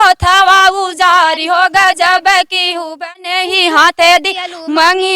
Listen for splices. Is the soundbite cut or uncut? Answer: cut